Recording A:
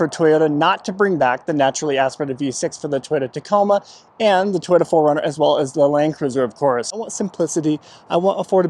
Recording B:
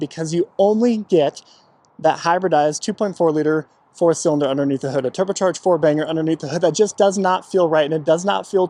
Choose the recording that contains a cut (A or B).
A